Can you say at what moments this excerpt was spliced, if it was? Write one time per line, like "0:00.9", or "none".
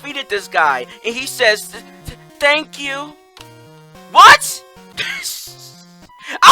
0:04.9